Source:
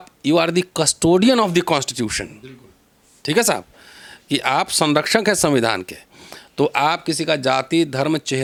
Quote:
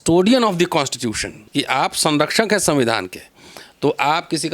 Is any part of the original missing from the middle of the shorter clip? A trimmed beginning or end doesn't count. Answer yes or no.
yes